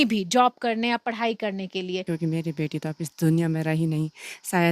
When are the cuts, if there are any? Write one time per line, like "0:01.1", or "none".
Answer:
0:02.0